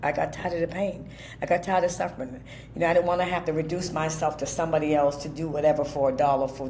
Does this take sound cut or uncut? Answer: uncut